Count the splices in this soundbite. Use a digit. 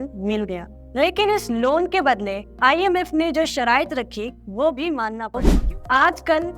1